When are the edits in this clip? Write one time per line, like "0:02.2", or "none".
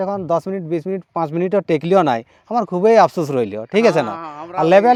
none